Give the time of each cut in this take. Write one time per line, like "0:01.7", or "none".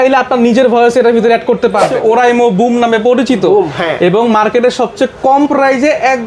0:01.9